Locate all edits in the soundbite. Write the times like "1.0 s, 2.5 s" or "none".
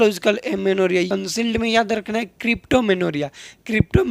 1.1 s